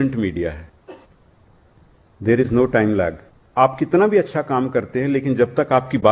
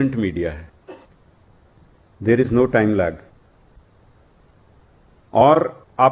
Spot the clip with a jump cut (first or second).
first